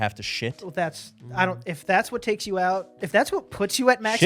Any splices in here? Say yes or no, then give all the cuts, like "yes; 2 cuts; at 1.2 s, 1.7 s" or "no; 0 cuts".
no; 0 cuts